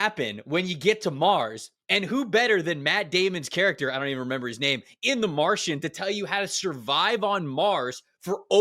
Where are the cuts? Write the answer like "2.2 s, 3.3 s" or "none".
none